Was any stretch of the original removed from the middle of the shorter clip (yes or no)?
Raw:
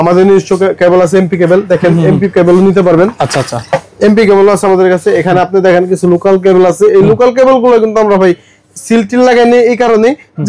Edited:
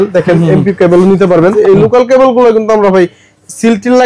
yes